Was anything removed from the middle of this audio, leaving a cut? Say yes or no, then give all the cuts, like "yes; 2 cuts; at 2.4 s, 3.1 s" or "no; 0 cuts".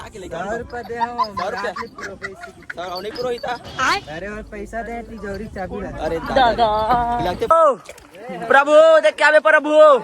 yes; 1 cut; at 7.5 s